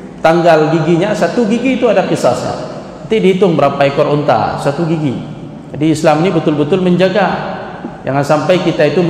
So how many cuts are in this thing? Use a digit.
0